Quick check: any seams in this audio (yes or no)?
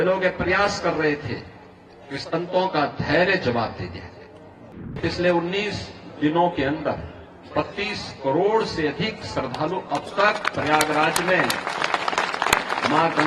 yes